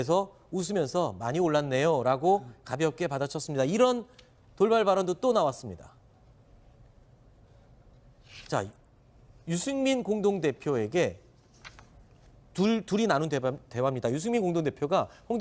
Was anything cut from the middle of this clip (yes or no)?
yes